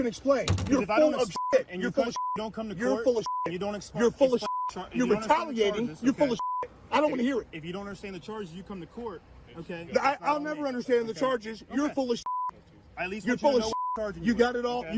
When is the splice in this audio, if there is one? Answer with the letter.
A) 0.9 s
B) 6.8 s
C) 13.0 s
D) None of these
D